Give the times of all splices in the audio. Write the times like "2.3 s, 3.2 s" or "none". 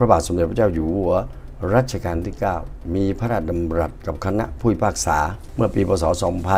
none